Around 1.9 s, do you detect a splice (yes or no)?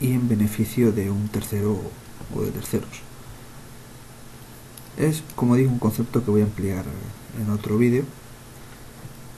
no